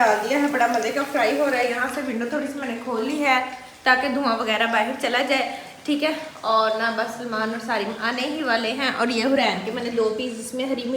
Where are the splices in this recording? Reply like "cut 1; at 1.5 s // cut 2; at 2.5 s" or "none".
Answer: none